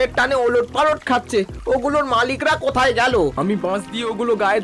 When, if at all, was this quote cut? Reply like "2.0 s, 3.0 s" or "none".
3.3 s